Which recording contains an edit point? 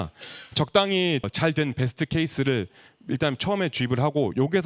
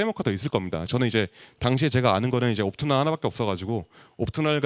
first; 1 cut; at 1.2 s

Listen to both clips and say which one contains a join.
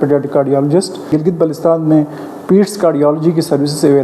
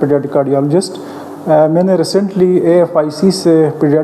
first; 1 cut; at 1.1 s

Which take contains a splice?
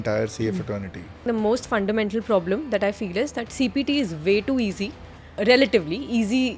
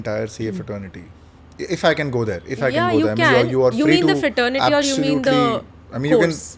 first; 2 cuts; at 1.2 s, 5.4 s

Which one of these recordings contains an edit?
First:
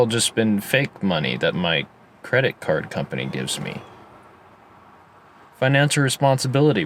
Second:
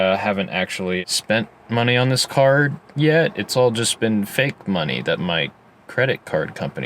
second; 1 cut; at 1.0 s

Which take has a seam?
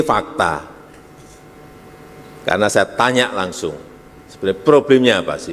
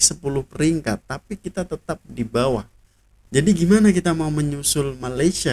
second; 1 cut; at 3.1 s

